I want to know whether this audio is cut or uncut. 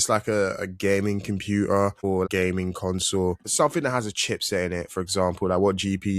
cut